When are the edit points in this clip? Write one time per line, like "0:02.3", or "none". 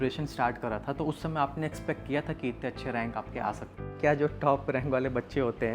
0:03.9